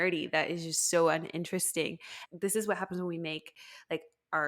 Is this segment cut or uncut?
cut